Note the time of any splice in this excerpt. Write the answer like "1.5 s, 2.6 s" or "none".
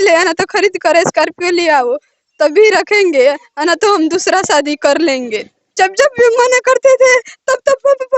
5.6 s